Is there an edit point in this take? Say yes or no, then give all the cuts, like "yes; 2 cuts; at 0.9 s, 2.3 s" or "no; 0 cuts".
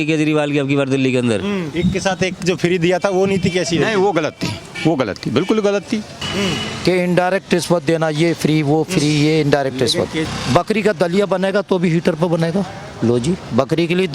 yes; 3 cuts; at 1.7 s, 6.2 s, 10.3 s